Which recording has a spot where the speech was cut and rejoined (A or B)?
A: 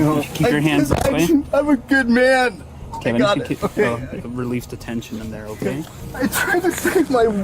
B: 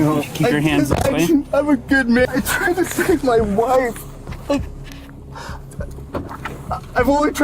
B